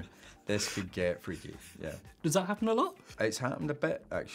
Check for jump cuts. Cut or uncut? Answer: uncut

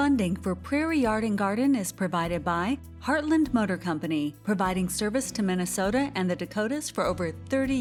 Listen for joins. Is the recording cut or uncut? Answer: uncut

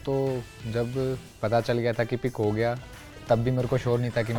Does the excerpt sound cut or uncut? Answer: uncut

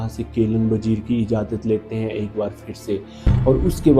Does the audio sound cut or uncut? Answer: uncut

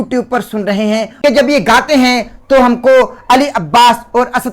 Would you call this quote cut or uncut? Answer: cut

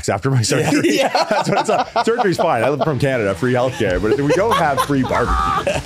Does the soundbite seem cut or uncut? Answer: uncut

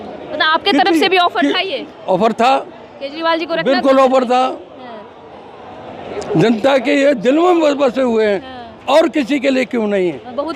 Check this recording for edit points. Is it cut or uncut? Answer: uncut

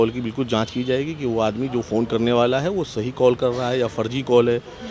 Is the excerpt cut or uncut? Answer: uncut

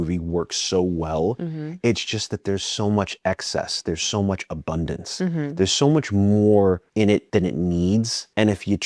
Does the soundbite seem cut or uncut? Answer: uncut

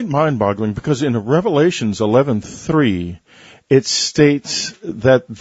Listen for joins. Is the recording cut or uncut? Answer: cut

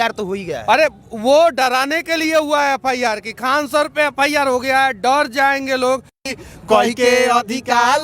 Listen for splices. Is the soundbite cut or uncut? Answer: cut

